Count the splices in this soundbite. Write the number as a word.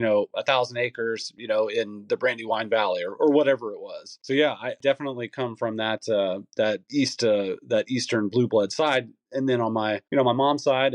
three